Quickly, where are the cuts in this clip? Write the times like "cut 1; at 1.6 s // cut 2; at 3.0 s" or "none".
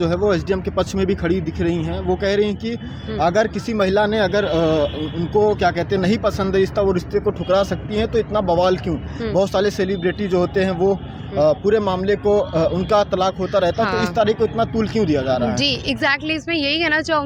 none